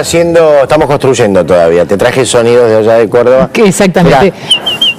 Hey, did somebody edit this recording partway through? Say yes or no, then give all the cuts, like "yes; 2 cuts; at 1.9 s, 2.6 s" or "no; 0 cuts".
yes; 1 cut; at 2.3 s